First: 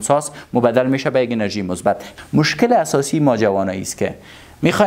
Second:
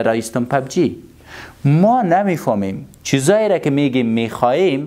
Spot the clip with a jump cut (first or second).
first